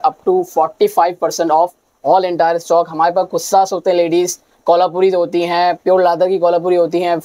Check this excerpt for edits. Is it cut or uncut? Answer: uncut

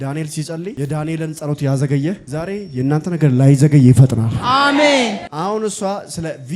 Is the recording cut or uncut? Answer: cut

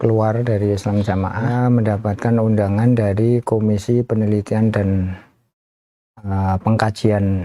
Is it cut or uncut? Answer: cut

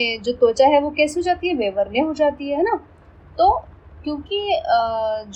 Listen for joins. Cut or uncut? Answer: uncut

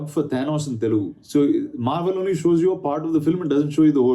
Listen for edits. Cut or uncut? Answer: cut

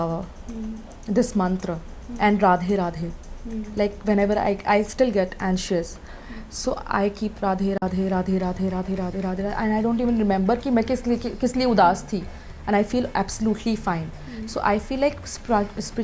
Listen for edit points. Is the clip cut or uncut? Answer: uncut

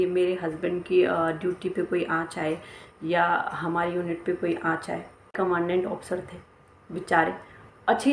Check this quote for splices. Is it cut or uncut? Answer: cut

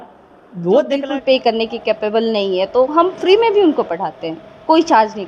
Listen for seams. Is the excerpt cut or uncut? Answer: cut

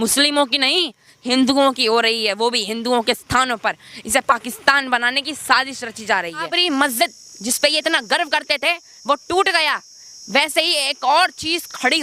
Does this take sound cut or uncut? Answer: cut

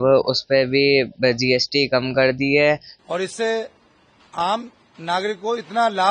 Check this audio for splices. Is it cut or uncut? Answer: cut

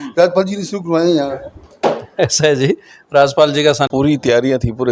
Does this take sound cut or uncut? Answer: cut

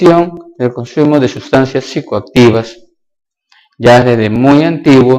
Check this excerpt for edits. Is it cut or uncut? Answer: cut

